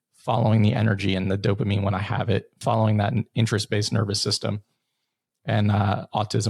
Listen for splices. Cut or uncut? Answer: uncut